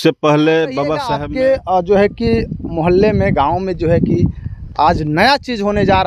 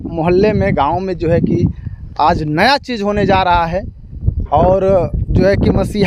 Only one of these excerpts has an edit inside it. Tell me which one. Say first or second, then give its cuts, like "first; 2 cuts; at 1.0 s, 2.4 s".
first; 1 cut; at 1.1 s